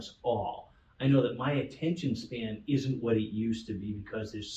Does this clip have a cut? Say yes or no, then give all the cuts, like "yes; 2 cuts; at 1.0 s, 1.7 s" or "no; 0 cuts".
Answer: no; 0 cuts